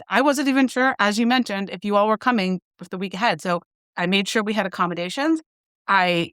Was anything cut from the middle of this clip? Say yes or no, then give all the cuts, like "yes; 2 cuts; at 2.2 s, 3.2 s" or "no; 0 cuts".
yes; 1 cut; at 3.9 s